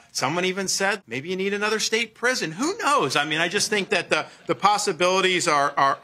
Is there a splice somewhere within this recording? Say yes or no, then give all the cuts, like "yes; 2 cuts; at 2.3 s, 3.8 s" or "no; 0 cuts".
yes; 1 cut; at 1.0 s